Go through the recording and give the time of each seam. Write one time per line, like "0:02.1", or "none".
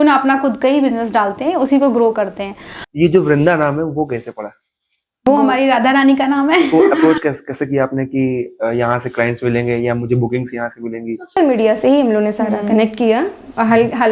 0:02.8
0:07.0